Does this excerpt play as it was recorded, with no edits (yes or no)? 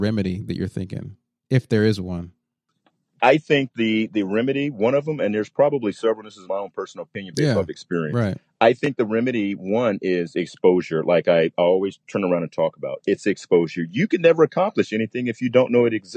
yes